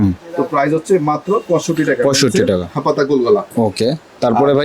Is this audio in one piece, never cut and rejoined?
yes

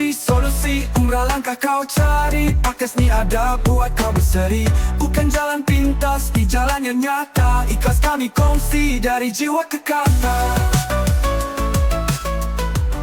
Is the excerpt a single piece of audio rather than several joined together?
yes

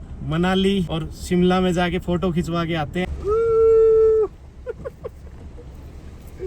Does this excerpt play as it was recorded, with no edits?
no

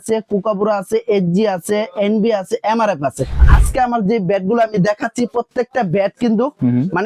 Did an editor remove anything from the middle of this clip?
yes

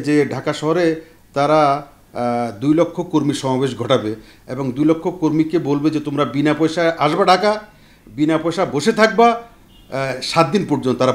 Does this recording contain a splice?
no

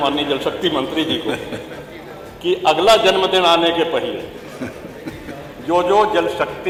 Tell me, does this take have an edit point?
no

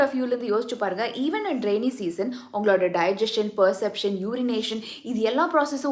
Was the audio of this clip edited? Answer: no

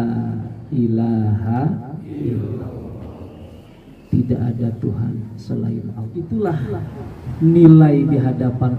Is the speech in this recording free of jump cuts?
no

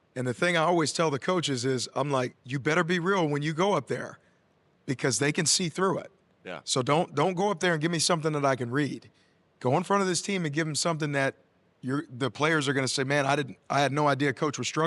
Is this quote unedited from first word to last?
yes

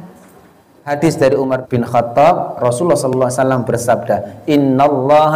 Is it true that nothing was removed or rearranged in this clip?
no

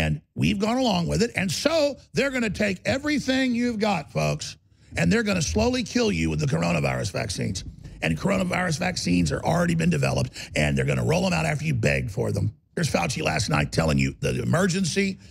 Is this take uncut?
no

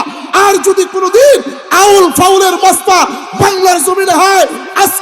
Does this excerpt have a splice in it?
no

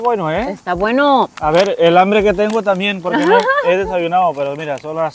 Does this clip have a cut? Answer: no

